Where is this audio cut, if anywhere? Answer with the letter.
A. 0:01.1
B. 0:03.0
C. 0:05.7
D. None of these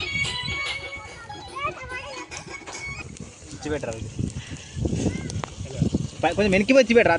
B